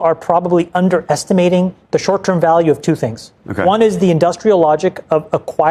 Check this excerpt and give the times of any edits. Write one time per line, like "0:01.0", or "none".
none